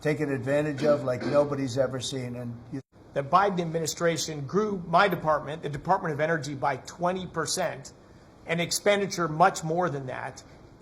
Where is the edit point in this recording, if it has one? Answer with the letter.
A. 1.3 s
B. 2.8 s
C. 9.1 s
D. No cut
B